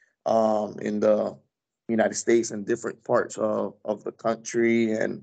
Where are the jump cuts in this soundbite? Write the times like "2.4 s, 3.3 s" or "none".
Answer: none